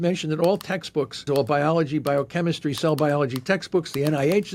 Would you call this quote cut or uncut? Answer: cut